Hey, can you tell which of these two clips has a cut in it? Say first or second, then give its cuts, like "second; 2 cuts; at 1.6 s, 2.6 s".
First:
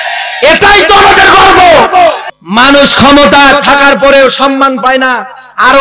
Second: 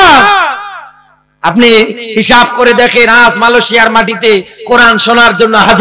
first; 1 cut; at 2.3 s